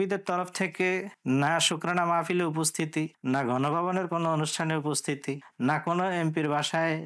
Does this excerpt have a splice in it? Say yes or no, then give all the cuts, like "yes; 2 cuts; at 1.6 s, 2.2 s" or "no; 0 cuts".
no; 0 cuts